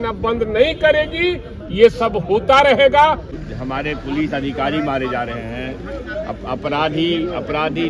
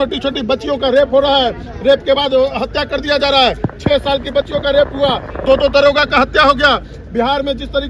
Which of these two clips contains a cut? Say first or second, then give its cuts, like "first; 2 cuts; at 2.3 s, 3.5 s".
first; 1 cut; at 3.3 s